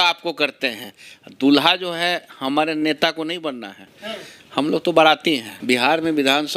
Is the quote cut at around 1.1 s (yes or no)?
no